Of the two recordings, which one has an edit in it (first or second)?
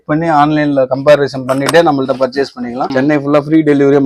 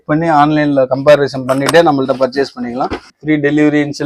first